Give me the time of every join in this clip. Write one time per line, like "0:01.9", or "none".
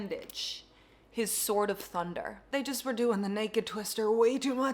0:02.4